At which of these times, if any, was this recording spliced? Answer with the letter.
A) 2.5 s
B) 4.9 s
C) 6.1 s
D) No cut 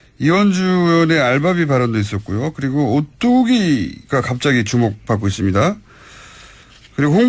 D